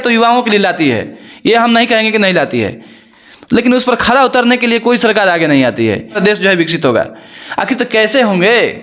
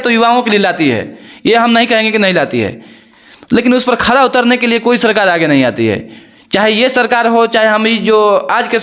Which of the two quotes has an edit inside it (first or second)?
first